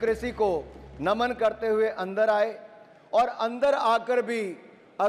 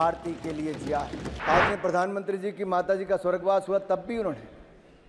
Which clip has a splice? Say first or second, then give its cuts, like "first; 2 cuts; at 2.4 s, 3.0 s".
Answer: second; 1 cut; at 1.3 s